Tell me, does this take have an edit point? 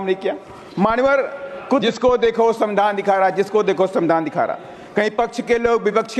yes; 1 cut; at 1.8 s

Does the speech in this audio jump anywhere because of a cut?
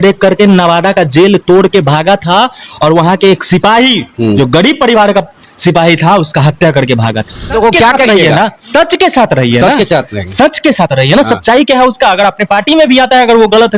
yes; 1 cut; at 7.5 s

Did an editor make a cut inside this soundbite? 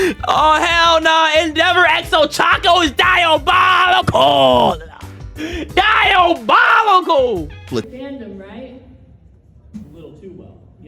yes; 1 cut; at 7.9 s

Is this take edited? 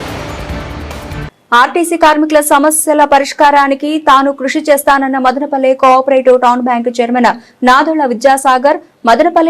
yes; 1 cut; at 1.2 s

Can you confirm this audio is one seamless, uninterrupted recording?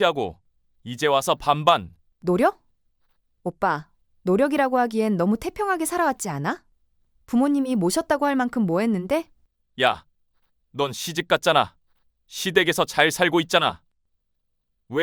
yes; 0 cuts

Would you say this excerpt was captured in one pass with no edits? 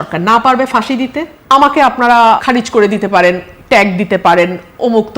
no; 2 cuts; at 1.3 s, 2.4 s

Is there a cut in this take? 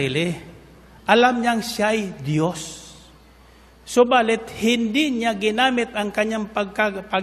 no; 0 cuts

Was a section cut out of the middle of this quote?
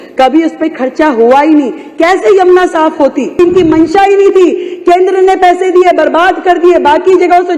yes; 1 cut; at 3.4 s

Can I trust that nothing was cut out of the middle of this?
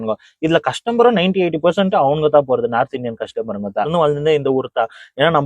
no; 1 cut; at 3.9 s

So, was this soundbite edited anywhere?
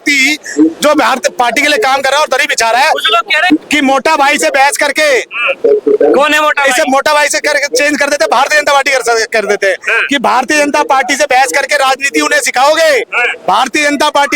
yes; 1 cut; at 3.4 s

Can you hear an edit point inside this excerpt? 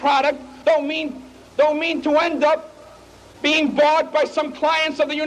yes; 1 cut; at 1.9 s

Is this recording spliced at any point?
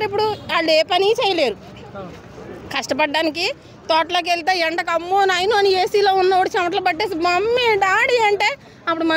no; 0 cuts

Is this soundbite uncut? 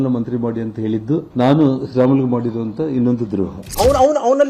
no; 2 cuts; at 1.3 s, 3.6 s

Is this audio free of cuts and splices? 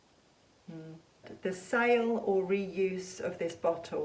no; 1 cut; at 1.3 s

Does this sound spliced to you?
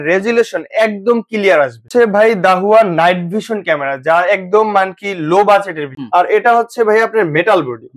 yes; 2 cuts; at 1.9 s, 6.0 s

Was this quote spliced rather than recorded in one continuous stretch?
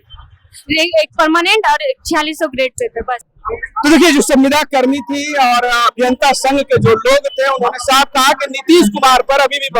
no; 0 cuts

